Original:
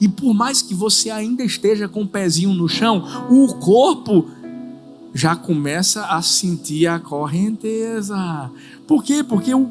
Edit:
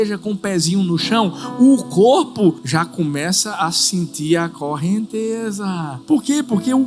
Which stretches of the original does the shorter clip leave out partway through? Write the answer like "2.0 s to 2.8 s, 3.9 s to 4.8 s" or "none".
4.3 s to 5.1 s, 8.4 s to 8.7 s